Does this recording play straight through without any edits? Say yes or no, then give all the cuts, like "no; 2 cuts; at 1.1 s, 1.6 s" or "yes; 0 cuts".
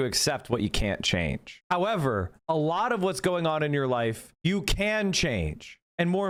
yes; 0 cuts